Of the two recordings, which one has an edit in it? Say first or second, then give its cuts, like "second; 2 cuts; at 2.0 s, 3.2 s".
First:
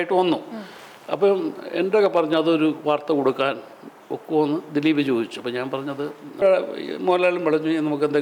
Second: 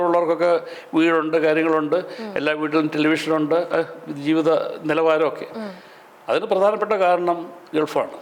first; 1 cut; at 6.4 s